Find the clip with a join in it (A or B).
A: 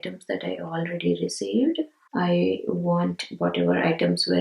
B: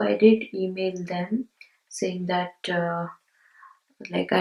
A